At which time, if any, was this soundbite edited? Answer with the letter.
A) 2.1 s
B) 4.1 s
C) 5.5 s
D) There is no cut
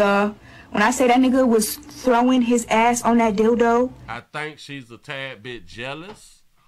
D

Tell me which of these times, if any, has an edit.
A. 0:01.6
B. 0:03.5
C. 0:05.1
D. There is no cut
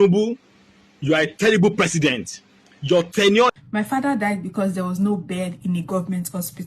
B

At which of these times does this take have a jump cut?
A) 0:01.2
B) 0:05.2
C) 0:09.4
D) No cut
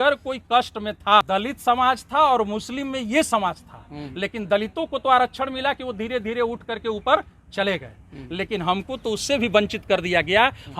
A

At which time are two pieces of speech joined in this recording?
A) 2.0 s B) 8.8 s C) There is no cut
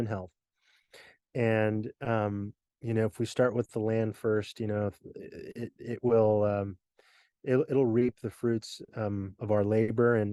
C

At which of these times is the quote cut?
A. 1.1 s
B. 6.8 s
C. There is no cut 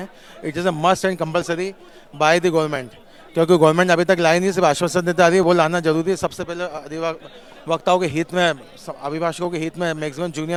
C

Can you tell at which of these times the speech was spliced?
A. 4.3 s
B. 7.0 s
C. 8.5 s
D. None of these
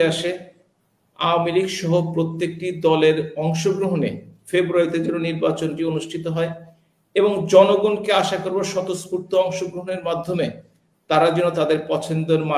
D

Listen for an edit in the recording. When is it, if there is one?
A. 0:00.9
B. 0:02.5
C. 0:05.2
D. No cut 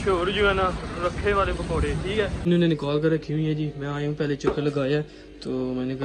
B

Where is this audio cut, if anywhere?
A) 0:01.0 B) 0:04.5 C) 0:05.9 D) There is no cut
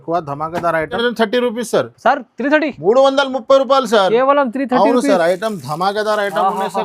A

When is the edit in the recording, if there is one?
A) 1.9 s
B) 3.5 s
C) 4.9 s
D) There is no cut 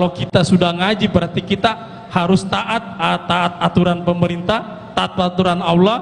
D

